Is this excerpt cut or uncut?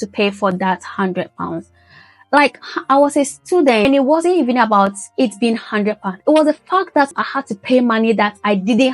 cut